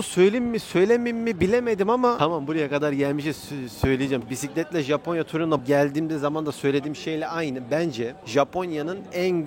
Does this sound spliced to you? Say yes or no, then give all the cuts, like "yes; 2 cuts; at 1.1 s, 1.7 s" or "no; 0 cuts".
yes; 3 cuts; at 2.2 s, 4.2 s, 8.2 s